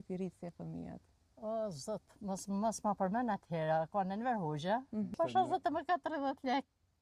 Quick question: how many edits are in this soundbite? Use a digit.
1